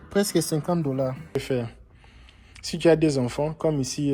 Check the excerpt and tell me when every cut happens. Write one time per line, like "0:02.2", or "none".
0:01.4